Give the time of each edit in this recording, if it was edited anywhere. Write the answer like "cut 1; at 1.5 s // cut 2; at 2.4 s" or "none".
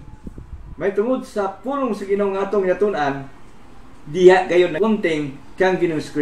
cut 1; at 4.7 s